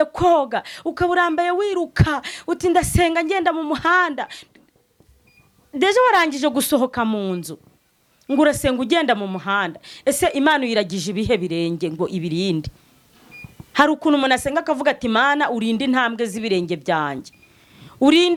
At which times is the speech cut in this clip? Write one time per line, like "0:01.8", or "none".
none